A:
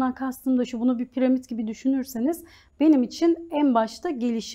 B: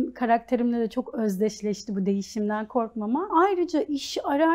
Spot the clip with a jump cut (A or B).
B